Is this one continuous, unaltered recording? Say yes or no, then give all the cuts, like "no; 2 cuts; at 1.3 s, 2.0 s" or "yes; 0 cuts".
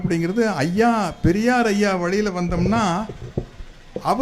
yes; 0 cuts